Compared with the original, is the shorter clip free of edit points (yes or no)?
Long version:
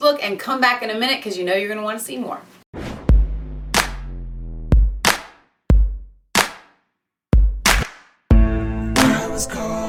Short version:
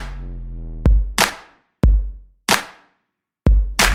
yes